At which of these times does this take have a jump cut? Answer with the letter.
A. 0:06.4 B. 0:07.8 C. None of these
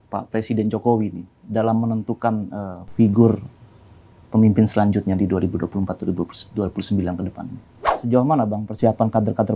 B